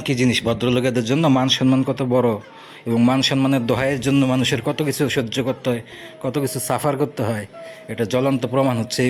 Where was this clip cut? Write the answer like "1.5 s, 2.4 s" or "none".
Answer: none

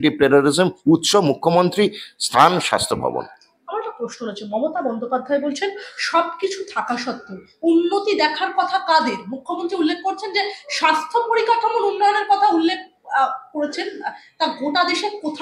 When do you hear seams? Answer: none

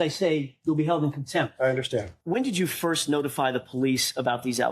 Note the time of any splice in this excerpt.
2.1 s

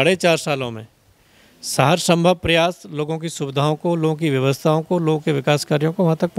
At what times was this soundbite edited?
none

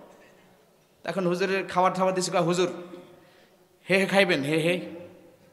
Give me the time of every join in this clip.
none

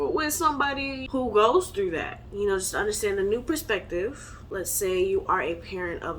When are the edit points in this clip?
1.0 s, 4.6 s

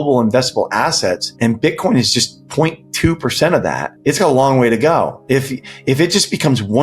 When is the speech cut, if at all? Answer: 1.3 s, 3.9 s

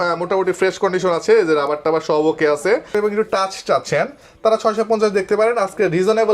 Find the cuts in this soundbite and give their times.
2.9 s

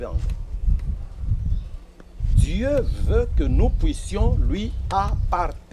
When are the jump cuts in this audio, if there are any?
none

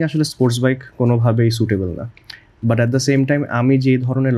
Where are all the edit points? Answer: none

